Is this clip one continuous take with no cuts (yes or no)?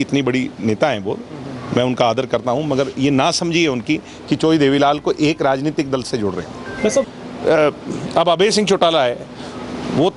no